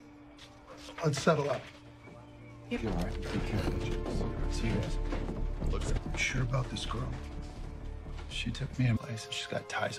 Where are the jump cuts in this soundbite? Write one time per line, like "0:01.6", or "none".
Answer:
0:06.0